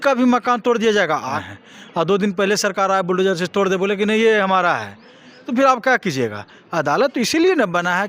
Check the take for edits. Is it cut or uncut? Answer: cut